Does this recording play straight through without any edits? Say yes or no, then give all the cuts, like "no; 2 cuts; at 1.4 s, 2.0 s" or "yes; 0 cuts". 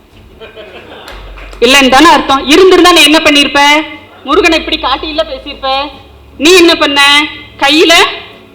yes; 0 cuts